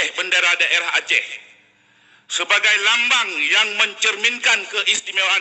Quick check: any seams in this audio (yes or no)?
no